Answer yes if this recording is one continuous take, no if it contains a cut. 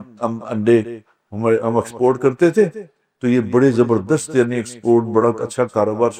yes